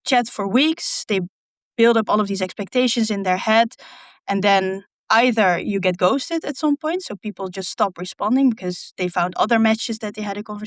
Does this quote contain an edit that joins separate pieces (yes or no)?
no